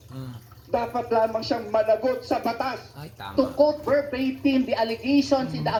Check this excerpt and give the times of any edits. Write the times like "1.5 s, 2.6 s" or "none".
none